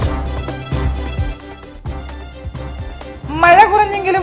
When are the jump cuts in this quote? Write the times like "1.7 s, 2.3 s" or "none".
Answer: 2.2 s